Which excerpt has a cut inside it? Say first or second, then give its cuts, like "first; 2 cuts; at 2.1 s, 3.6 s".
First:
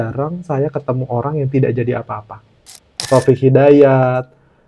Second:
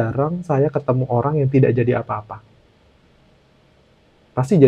first; 1 cut; at 2.9 s